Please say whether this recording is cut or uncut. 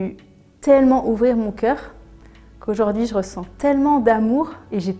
uncut